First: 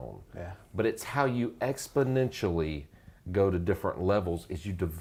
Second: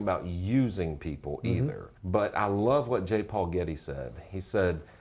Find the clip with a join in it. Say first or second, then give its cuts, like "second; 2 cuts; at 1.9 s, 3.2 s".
second; 1 cut; at 1.9 s